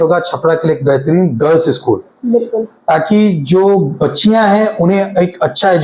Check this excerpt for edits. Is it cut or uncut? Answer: uncut